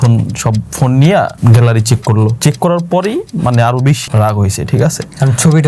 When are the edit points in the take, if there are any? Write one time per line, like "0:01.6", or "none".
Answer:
0:01.3
0:02.4
0:04.0